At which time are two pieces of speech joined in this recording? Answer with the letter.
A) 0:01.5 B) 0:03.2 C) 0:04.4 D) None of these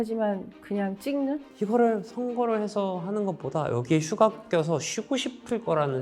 A